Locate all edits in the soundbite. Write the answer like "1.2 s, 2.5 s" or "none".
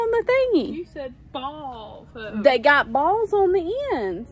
none

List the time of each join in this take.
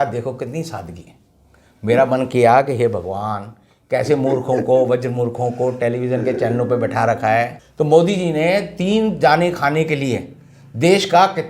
7.6 s

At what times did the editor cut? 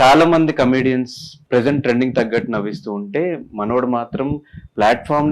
1.4 s

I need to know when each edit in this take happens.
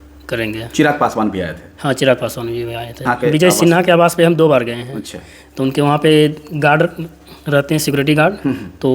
3.1 s

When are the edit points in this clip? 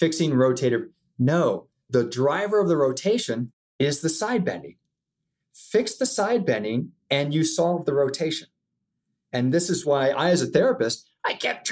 1.8 s

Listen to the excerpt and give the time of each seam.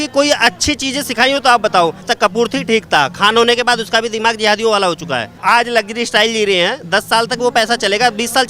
2.1 s, 5.4 s

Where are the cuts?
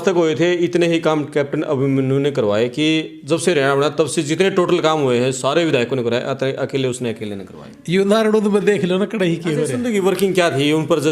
9.7 s

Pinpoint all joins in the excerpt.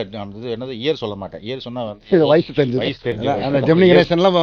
3.1 s

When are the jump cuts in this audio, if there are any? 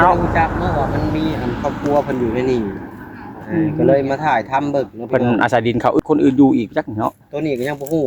6.0 s

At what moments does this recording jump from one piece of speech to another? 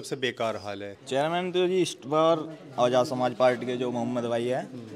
1.0 s

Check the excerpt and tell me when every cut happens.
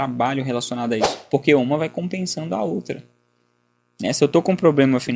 1.1 s

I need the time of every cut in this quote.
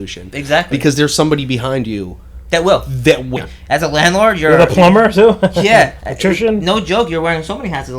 3.3 s

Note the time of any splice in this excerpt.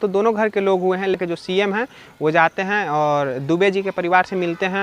1.2 s

